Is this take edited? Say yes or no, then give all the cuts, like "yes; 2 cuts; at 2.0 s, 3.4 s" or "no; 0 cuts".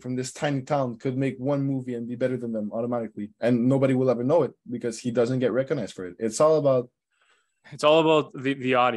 no; 0 cuts